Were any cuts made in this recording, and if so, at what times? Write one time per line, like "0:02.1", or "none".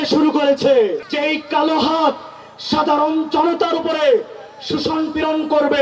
0:01.0